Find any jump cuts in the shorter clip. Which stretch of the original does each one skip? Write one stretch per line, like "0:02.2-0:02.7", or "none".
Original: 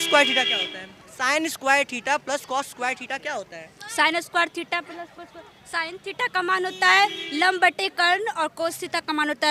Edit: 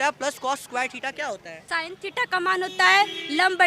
0:03.6-0:05.6